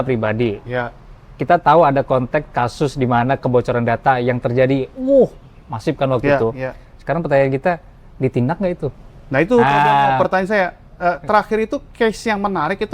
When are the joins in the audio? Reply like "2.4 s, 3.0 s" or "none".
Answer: none